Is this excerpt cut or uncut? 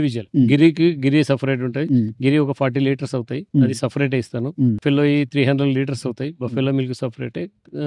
uncut